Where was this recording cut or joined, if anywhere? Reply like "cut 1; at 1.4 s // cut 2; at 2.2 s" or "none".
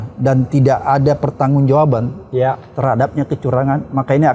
none

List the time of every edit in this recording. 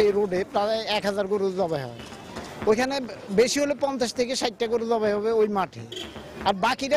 none

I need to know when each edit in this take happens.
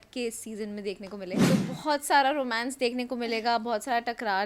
cut 1; at 1.4 s

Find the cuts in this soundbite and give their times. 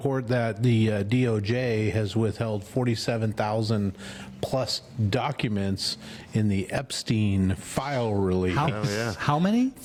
none

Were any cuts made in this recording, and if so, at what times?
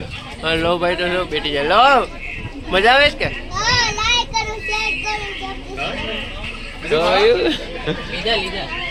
none

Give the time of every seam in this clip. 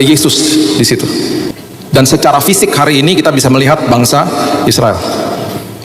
cut 1; at 1.5 s

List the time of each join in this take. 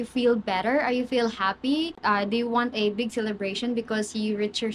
cut 1; at 2.0 s

